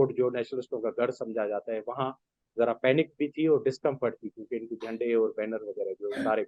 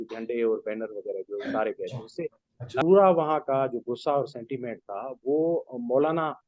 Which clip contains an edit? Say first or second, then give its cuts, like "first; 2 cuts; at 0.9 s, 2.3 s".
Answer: second; 1 cut; at 2.8 s